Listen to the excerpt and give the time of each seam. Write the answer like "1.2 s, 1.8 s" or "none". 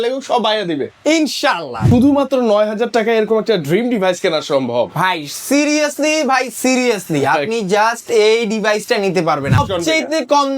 1.8 s, 9.6 s